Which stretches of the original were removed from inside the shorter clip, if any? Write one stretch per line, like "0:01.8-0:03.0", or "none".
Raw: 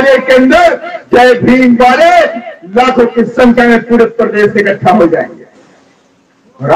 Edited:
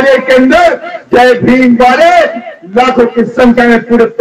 none